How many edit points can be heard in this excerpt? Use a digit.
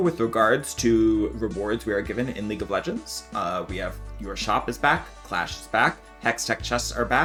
0